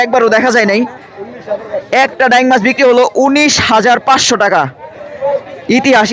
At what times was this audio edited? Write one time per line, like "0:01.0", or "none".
none